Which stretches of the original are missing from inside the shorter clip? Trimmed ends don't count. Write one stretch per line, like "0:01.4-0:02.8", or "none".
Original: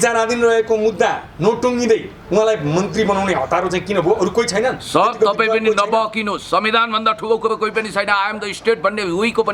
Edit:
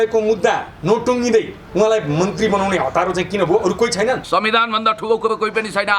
0:04.8-0:06.4